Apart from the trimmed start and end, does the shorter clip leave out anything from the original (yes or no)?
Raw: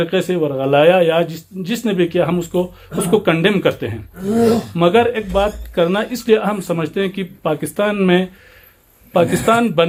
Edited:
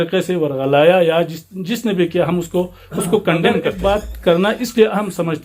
yes